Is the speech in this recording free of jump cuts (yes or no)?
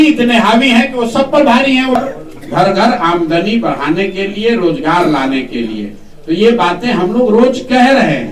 no